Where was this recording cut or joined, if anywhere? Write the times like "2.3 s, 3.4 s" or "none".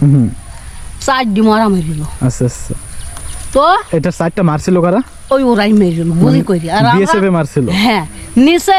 none